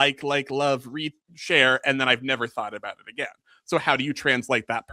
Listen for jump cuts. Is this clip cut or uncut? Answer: uncut